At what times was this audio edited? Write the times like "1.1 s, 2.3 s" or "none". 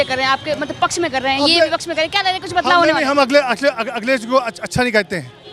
none